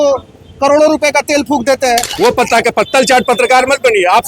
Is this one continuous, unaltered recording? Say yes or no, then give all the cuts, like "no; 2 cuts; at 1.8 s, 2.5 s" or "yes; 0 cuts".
no; 1 cut; at 2.1 s